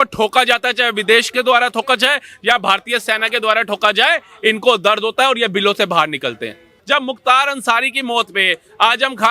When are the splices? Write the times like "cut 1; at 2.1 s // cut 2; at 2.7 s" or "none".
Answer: cut 1; at 6.7 s